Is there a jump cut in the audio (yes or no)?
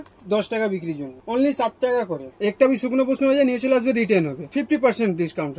yes